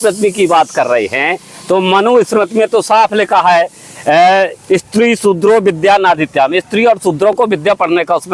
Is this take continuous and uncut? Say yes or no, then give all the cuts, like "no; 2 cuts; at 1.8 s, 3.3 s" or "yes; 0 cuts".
yes; 0 cuts